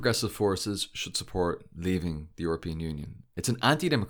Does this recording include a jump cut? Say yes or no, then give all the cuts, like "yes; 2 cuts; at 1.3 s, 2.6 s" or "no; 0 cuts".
no; 0 cuts